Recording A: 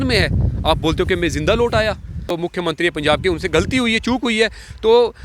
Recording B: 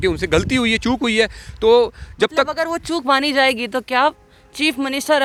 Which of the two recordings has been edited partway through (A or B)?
A